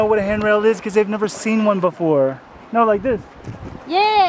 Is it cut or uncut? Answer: uncut